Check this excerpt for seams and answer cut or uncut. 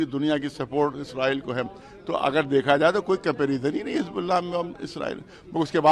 uncut